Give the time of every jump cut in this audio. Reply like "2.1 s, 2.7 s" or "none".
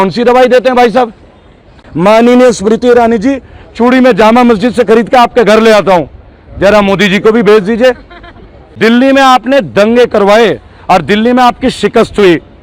1.8 s, 8.7 s